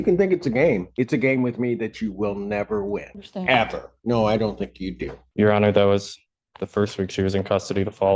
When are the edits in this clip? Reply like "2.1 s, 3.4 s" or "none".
none